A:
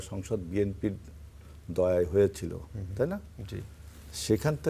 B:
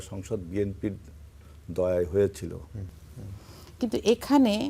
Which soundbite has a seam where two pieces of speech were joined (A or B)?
B